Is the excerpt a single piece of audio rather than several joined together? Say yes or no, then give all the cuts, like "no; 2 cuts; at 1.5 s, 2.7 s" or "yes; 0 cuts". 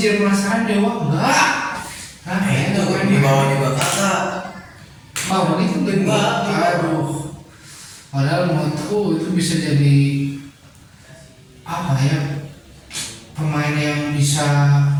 yes; 0 cuts